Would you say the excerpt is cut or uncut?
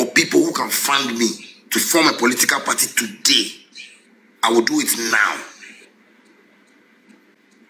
uncut